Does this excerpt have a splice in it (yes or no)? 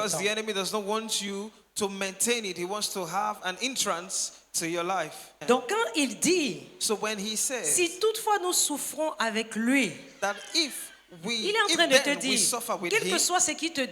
yes